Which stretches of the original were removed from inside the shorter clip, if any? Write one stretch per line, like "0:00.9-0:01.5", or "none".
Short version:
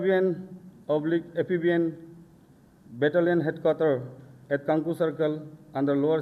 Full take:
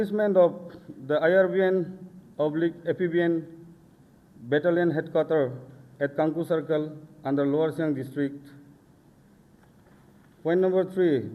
none